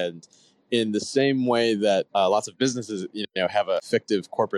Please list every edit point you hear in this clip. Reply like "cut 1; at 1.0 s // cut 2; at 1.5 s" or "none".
cut 1; at 2.1 s // cut 2; at 3.8 s